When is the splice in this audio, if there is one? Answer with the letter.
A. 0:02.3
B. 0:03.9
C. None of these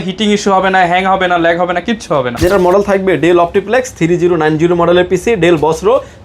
A